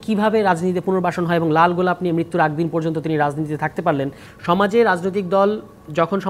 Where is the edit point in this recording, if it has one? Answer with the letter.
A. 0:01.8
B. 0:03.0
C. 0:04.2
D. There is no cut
C